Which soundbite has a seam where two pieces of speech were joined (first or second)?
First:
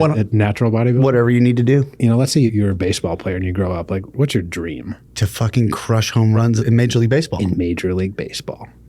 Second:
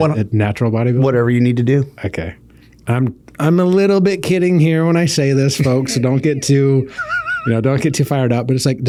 first